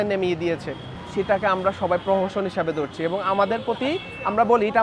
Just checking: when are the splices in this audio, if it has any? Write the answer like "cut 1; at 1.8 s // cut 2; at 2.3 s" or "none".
none